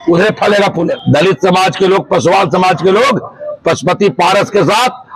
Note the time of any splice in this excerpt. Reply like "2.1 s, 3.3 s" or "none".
1.0 s

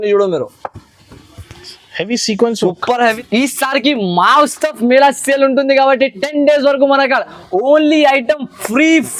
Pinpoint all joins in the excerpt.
3.1 s

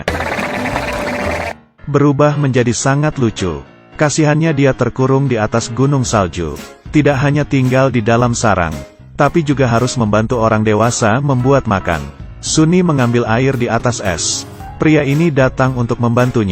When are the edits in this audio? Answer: 1.0 s

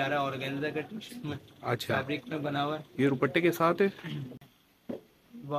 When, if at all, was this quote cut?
4.4 s

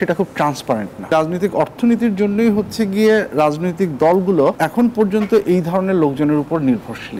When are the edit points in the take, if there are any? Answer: 1.1 s, 4.6 s

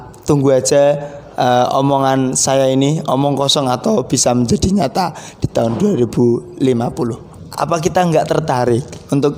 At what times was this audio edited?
7.3 s

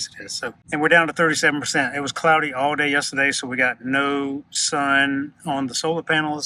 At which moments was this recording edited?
none

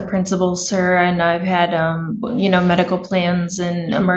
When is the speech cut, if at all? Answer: none

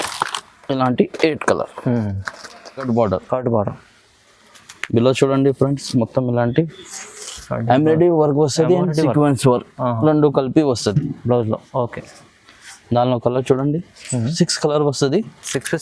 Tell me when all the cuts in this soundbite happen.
2.9 s

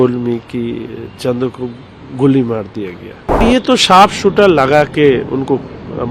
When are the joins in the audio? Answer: 3.4 s

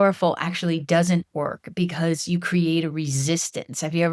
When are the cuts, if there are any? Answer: none

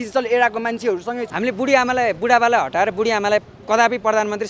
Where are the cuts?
1.2 s

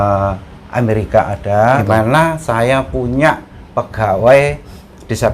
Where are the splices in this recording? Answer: 1.8 s

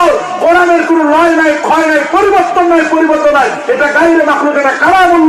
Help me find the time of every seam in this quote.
none

